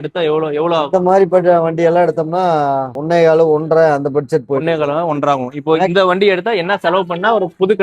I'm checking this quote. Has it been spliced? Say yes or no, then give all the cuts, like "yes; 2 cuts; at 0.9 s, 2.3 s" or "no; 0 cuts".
no; 0 cuts